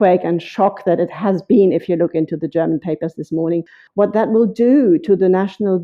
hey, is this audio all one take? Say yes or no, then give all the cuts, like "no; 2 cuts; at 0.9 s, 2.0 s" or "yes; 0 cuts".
no; 1 cut; at 3.8 s